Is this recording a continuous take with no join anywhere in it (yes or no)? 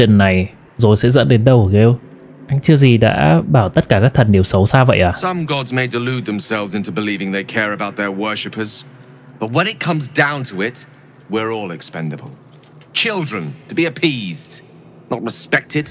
yes